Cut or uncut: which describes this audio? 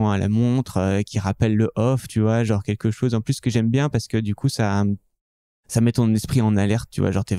uncut